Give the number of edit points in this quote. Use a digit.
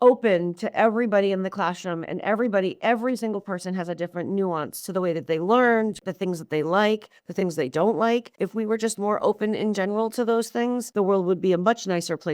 3